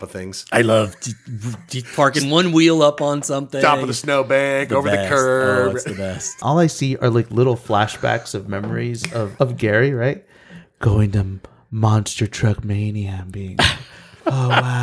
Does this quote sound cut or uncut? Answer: cut